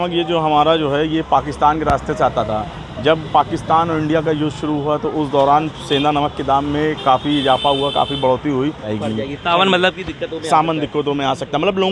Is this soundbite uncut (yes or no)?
no